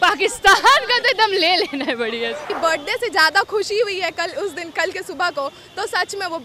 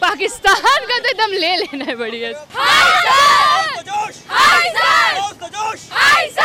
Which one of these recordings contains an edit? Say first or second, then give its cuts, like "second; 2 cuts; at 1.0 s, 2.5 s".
first; 1 cut; at 2.4 s